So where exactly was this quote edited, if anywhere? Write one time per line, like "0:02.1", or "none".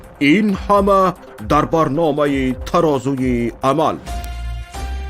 0:04.0